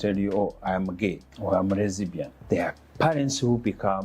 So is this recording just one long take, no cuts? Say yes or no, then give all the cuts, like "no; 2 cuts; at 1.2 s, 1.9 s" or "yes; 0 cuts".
no; 2 cuts; at 1.3 s, 2.3 s